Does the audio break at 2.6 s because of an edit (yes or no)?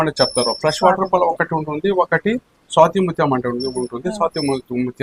no